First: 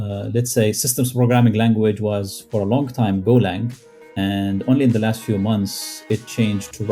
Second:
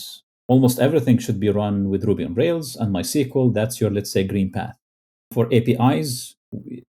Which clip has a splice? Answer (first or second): second